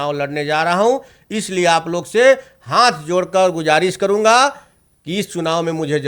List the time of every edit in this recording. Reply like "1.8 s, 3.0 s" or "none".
none